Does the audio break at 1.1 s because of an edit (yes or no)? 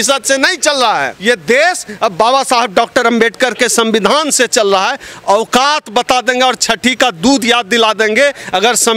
yes